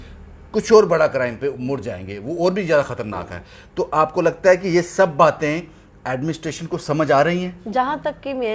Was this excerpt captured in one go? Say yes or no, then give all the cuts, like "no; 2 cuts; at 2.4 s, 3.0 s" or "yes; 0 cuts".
yes; 0 cuts